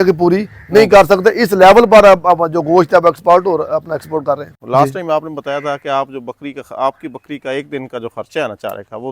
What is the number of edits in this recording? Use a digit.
1